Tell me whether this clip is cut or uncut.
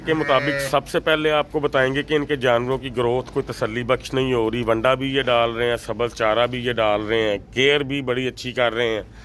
uncut